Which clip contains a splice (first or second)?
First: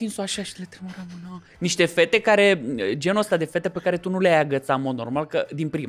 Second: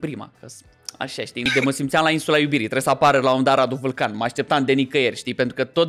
second